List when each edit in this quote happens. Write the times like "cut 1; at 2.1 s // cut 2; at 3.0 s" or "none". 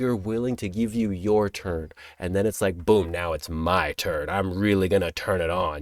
none